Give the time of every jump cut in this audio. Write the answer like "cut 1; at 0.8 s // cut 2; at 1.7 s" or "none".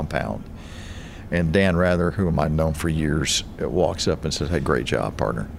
none